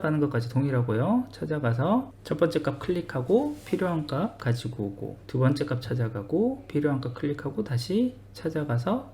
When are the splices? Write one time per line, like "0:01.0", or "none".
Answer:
0:02.2
0:05.2